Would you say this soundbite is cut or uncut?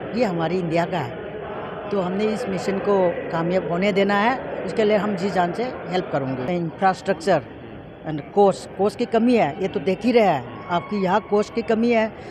cut